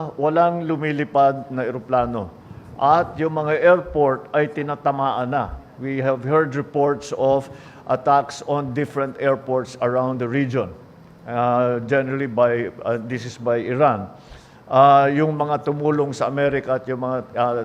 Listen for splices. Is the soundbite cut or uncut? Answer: uncut